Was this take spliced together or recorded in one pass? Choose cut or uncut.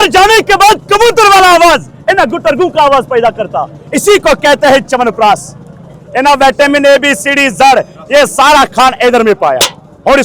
uncut